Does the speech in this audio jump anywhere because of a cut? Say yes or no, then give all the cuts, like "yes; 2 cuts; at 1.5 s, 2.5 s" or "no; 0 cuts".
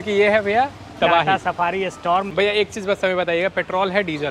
yes; 1 cut; at 2.3 s